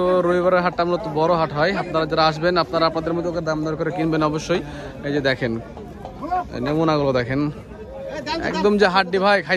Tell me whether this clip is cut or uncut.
uncut